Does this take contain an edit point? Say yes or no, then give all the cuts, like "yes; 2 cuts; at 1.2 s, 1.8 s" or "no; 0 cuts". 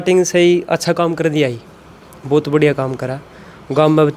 no; 0 cuts